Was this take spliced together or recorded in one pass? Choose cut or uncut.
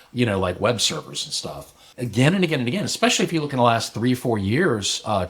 cut